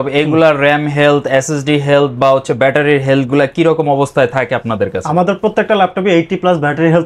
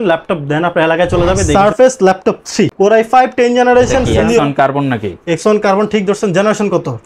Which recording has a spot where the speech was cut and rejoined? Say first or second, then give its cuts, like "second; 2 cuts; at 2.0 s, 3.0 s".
second; 3 cuts; at 1.5 s, 2.7 s, 4.4 s